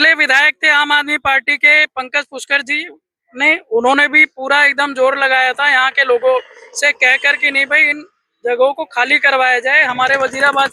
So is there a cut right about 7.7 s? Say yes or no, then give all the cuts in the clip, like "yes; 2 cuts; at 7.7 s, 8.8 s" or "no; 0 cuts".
no; 0 cuts